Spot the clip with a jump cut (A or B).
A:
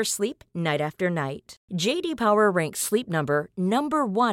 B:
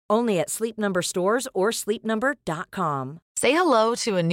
B